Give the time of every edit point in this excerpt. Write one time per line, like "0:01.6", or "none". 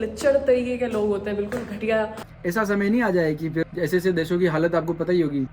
0:02.1